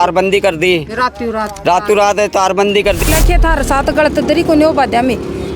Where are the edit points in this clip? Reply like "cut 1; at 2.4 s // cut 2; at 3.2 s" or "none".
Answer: cut 1; at 3.0 s